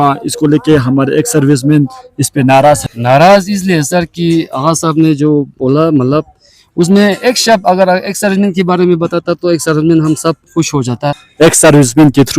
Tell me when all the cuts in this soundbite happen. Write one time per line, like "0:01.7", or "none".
0:02.9
0:11.2